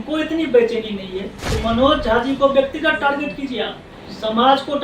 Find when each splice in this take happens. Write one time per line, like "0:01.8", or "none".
0:01.4